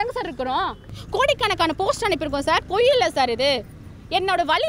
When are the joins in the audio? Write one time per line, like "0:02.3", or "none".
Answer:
0:01.0